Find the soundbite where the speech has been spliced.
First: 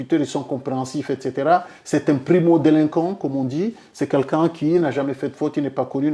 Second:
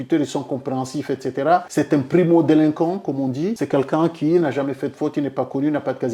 second; 2 cuts; at 1.7 s, 3.6 s

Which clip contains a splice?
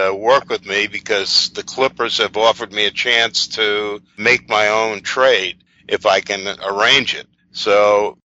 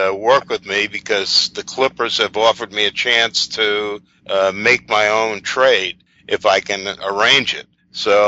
first; 1 cut; at 4.2 s

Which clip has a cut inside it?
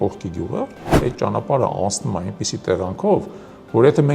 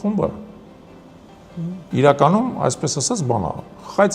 first; 1 cut; at 1.0 s

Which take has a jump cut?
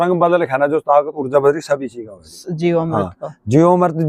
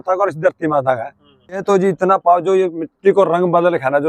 second; 1 cut; at 1.6 s

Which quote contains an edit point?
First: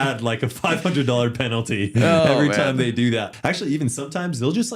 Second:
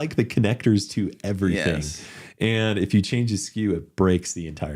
first; 1 cut; at 3.3 s

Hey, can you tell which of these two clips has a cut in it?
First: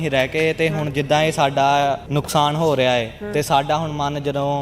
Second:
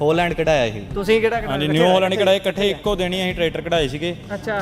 first; 1 cut; at 2.0 s

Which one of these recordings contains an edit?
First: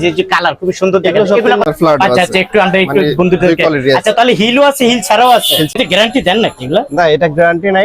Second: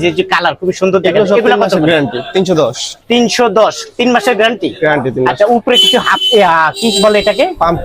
first; 2 cuts; at 1.7 s, 5.8 s

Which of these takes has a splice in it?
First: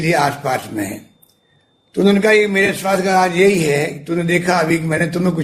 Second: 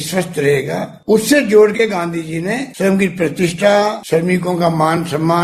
second; 3 cuts; at 0.9 s, 2.7 s, 4.0 s

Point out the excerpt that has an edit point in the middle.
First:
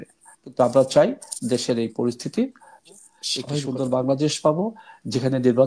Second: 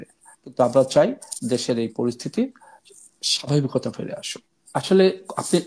first; 1 cut; at 3.5 s

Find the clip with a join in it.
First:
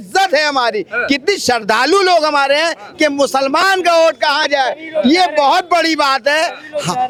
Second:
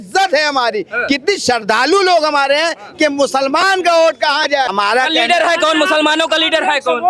second; 1 cut; at 4.7 s

